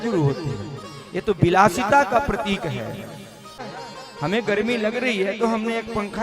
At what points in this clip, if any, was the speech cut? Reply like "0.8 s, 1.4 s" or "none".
3.7 s